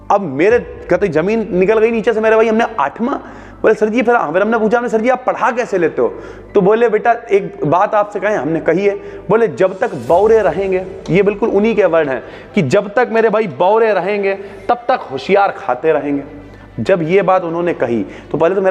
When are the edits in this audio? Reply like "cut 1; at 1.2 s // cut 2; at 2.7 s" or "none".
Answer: none